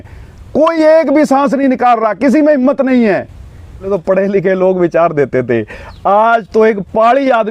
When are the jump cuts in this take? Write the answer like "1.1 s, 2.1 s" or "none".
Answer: 3.9 s